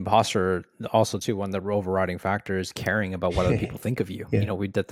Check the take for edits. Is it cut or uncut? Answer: uncut